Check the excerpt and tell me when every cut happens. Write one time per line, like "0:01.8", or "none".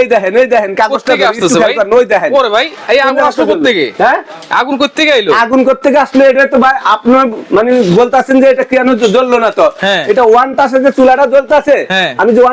none